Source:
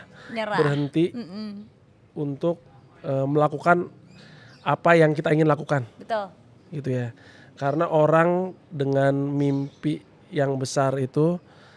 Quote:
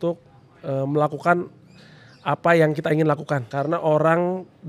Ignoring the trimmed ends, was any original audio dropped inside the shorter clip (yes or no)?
yes